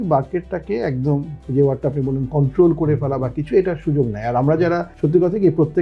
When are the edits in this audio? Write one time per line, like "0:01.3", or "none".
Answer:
0:01.4